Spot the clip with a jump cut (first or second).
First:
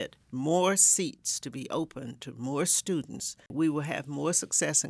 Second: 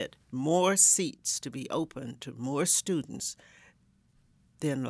first